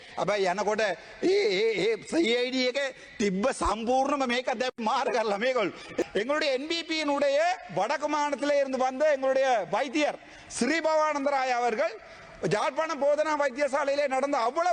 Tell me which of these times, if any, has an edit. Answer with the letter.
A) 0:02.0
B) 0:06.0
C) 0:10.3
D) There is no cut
B